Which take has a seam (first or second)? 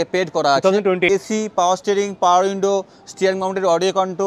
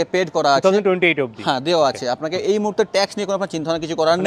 first